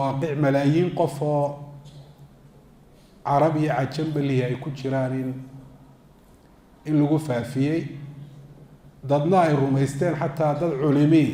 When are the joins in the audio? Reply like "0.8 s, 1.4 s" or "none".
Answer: none